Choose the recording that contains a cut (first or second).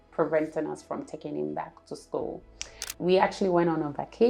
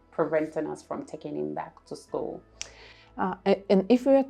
first